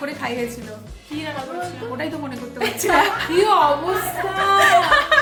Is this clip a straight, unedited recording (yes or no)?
yes